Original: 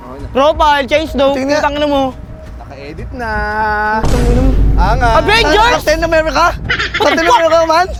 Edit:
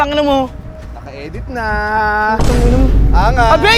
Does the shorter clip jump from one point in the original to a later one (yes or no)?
no